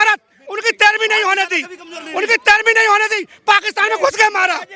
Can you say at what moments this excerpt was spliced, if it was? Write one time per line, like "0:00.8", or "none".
none

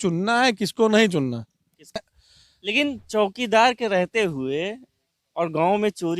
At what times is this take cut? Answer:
0:02.0

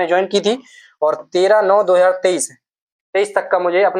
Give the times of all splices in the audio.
none

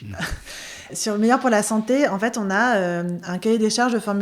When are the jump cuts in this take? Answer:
0:00.9

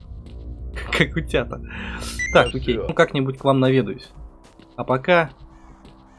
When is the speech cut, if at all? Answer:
0:02.9

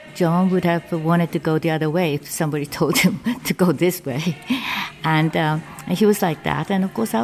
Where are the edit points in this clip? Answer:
none

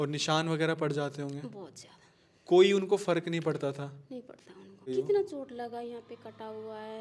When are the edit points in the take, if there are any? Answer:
0:04.8

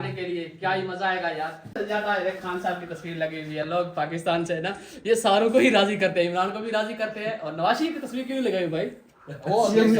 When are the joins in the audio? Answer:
0:01.7

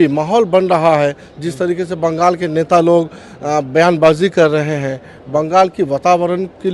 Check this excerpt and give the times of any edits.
none

